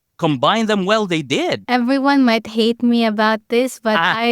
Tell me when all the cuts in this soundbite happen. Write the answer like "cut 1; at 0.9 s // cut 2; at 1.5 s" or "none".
cut 1; at 1.6 s